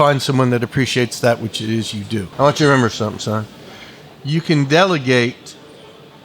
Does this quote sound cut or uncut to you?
cut